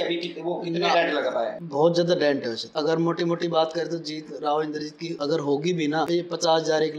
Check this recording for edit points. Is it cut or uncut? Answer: cut